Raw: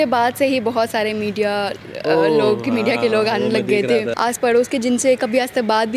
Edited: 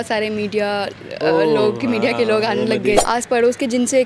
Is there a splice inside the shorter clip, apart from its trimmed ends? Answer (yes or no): yes